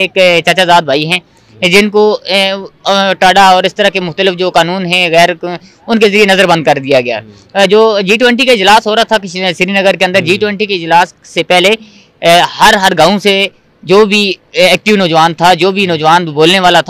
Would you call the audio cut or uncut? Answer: uncut